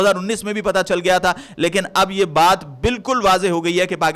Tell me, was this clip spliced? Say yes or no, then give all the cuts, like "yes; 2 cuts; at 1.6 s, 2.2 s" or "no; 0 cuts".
no; 0 cuts